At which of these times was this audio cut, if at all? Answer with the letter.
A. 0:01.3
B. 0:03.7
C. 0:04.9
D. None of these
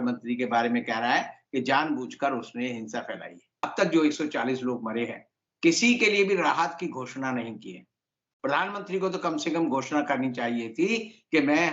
B